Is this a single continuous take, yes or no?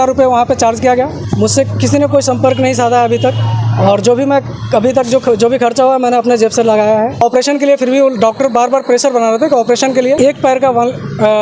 no